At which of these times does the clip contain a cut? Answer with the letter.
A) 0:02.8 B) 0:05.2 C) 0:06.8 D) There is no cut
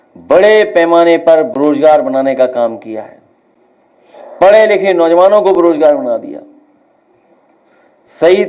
D